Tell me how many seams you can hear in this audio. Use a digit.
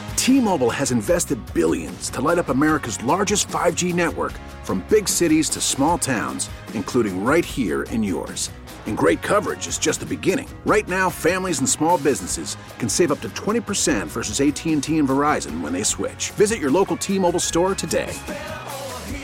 0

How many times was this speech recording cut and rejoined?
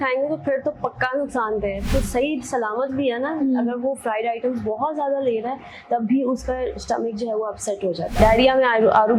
2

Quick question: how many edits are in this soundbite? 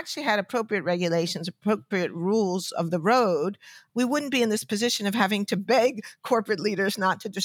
1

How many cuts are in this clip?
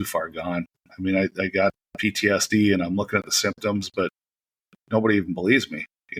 0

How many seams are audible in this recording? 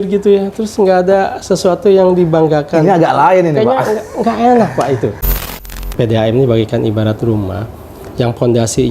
1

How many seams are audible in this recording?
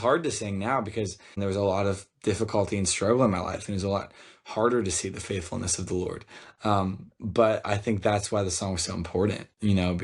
1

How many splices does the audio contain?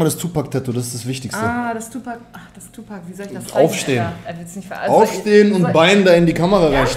0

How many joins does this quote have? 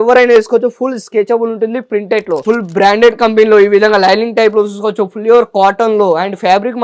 1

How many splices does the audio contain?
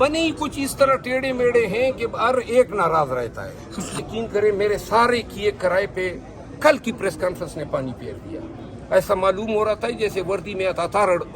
1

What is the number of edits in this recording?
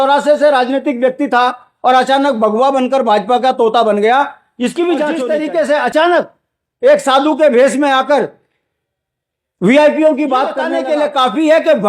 2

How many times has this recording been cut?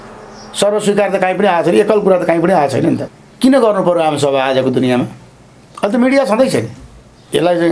1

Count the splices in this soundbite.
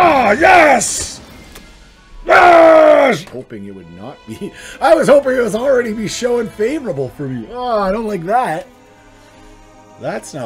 1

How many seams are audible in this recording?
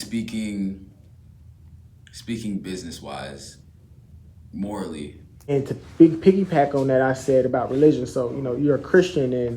1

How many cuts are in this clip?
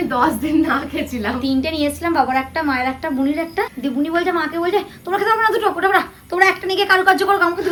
0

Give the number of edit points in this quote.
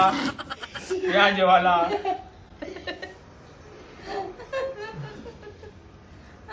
0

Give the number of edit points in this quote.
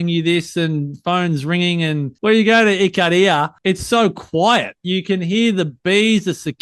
2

